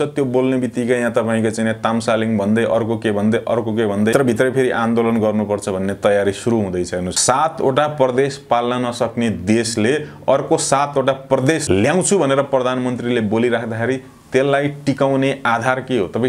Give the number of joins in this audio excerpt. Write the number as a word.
three